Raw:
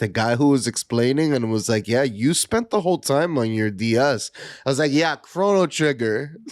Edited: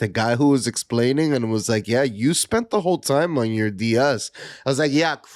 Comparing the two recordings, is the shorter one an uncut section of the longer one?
yes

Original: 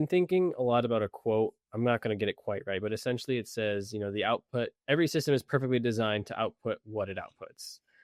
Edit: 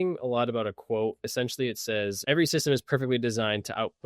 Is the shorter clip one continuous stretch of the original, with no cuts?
no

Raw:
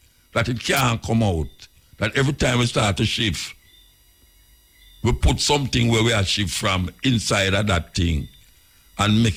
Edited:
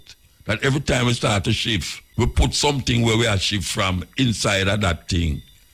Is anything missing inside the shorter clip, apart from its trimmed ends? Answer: yes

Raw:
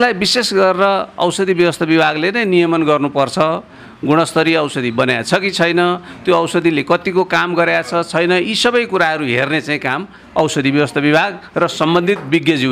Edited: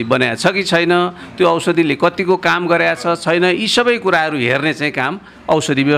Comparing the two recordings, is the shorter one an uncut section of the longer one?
yes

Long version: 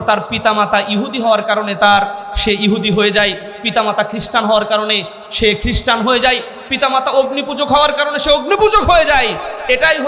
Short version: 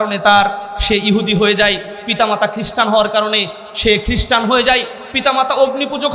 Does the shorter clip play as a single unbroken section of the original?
yes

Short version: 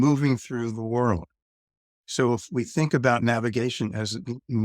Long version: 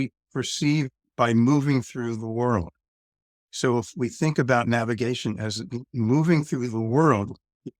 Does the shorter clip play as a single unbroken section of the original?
yes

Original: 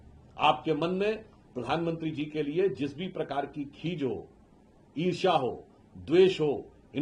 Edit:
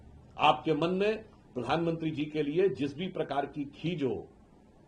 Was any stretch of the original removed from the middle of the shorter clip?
no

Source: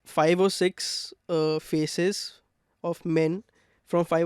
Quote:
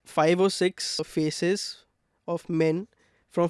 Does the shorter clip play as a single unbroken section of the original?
no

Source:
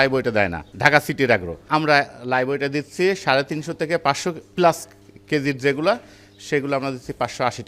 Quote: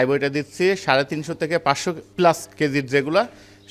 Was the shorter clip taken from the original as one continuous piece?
no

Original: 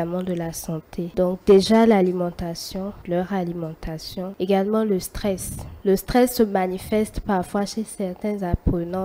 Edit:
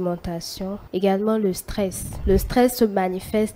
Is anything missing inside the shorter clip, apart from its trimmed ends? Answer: yes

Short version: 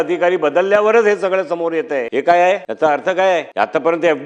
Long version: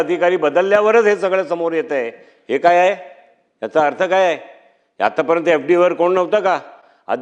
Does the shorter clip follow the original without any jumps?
no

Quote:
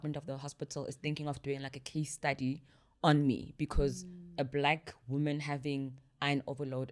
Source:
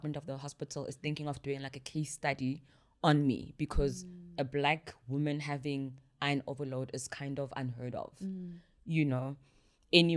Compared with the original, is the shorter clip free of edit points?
yes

